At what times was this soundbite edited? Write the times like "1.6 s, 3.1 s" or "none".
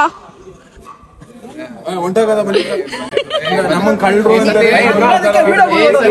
none